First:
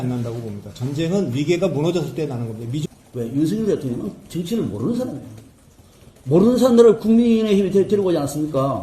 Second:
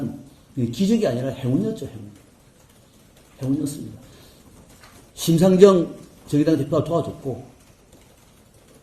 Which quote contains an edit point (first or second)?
first